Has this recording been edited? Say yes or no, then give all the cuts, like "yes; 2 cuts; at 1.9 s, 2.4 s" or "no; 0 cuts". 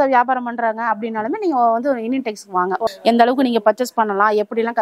yes; 1 cut; at 2.8 s